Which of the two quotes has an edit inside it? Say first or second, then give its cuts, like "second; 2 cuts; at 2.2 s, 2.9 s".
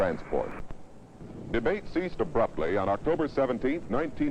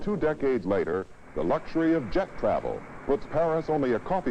first; 1 cut; at 2.5 s